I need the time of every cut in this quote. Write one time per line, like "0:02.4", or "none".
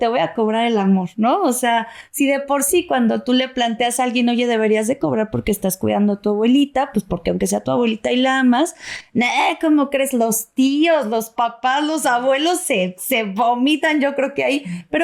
none